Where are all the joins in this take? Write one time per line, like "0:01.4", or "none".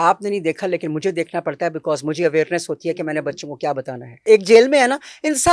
0:04.2